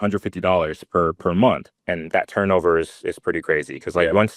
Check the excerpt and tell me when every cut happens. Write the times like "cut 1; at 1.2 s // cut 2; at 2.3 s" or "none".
cut 1; at 1.8 s